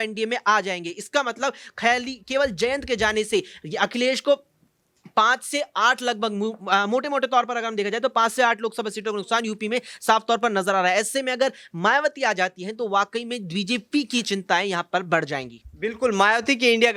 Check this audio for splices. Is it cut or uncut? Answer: uncut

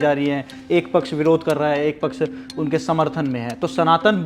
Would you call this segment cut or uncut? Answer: uncut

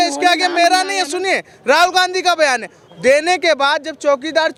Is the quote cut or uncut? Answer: uncut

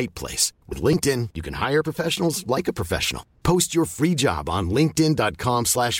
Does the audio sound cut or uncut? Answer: uncut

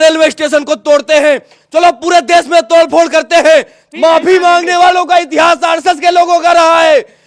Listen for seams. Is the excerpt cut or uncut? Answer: cut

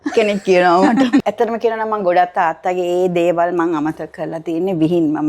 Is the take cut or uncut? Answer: cut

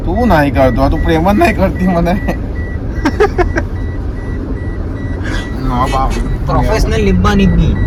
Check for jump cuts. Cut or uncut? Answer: uncut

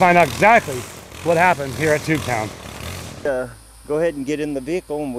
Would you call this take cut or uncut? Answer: cut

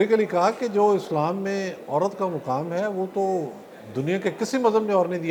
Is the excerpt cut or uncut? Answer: uncut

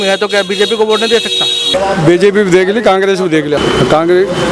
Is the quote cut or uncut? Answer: cut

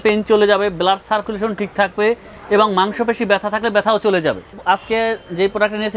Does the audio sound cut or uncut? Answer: uncut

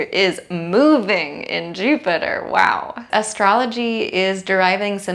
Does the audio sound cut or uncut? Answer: cut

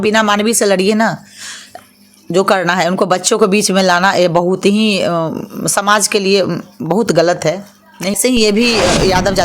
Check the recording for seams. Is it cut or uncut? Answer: cut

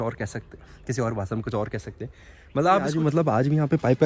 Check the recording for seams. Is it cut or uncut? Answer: cut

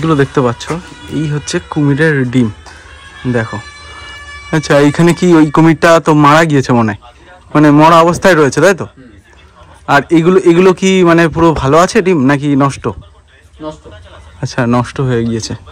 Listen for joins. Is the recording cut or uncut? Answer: uncut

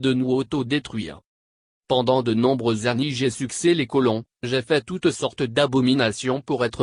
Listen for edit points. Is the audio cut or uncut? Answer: cut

